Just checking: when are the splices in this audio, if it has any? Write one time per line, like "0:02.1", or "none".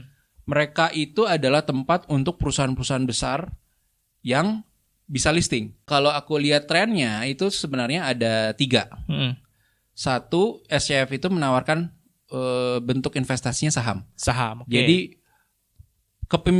0:05.9